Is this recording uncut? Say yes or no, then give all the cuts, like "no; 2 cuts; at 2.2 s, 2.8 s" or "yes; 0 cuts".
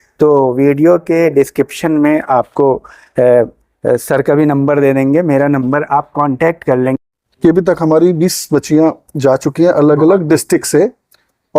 no; 1 cut; at 6.9 s